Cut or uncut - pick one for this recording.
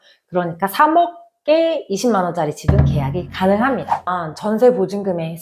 cut